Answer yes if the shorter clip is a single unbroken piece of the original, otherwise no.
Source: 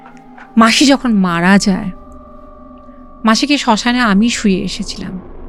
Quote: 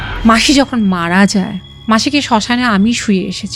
no